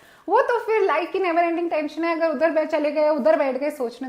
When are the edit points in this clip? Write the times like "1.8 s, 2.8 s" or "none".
none